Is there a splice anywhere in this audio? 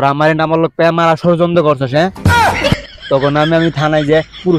no; 0 cuts

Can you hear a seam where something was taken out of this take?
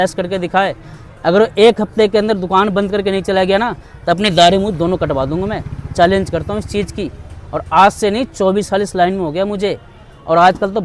no; 0 cuts

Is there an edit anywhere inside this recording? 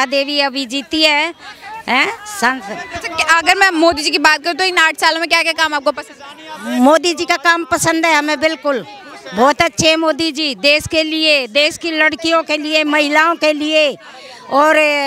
no; 0 cuts

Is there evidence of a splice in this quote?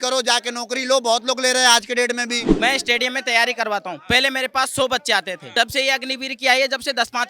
yes; 2 cuts; at 2.5 s, 5.4 s

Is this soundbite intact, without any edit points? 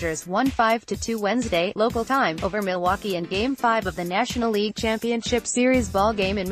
yes; 0 cuts

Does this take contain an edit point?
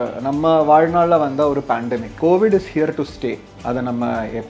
yes; 2 cuts; at 2.1 s, 3.5 s

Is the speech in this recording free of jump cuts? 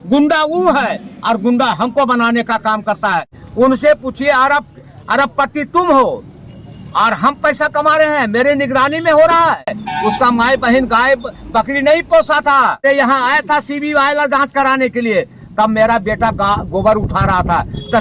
no; 3 cuts; at 3.4 s, 9.8 s, 12.8 s

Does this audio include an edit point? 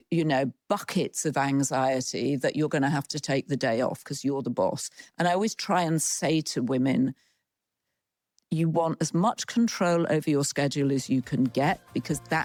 no; 0 cuts

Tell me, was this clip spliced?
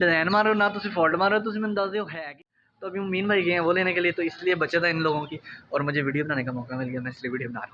yes; 1 cut; at 2.4 s

